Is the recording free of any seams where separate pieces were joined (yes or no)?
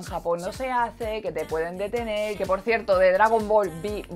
no